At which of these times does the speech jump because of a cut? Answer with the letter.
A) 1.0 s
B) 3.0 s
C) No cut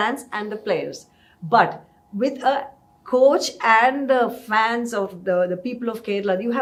C